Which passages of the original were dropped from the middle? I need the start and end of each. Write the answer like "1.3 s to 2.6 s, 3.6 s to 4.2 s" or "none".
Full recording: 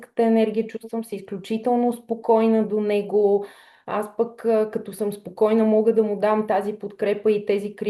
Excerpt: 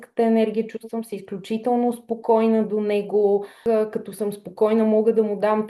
3.6 s to 4.4 s